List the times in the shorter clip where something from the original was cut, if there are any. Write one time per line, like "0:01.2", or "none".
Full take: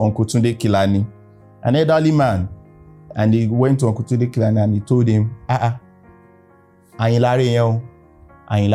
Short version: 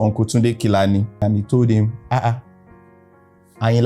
0:01.2